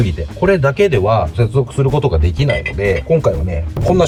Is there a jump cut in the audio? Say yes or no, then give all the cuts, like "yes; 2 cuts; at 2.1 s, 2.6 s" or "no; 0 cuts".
no; 0 cuts